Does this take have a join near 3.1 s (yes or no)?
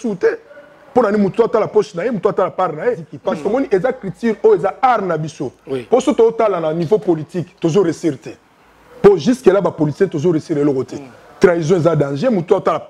yes